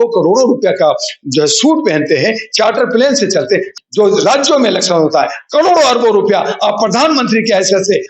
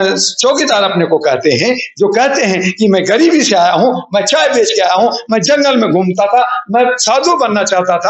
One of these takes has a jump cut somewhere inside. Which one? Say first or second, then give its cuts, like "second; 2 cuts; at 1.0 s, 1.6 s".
first; 1 cut; at 3.8 s